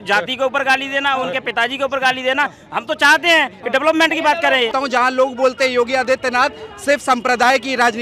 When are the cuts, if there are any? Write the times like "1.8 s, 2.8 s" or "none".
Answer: 4.7 s